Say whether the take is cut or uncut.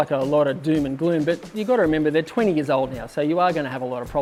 uncut